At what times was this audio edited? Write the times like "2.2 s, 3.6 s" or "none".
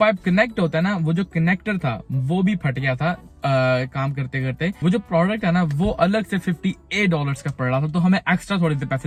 none